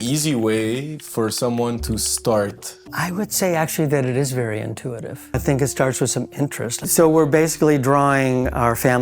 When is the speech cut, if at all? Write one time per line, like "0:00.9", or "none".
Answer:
0:02.7
0:05.4
0:06.9